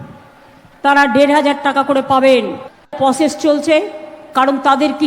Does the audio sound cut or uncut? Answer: cut